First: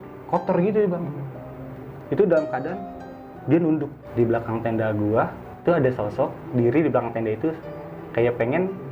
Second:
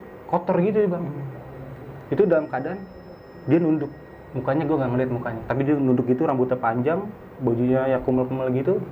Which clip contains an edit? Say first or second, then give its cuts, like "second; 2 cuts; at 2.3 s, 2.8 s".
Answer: first; 2 cuts; at 4.0 s, 5.5 s